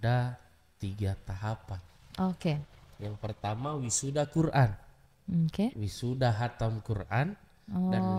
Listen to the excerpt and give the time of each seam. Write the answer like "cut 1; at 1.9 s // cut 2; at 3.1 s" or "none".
none